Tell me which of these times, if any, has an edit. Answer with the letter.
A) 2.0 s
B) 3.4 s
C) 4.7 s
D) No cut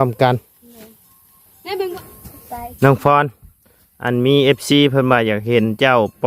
A